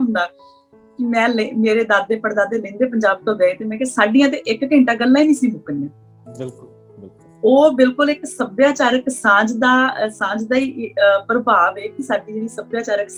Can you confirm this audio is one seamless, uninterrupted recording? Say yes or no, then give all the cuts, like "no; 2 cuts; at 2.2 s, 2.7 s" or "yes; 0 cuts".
yes; 0 cuts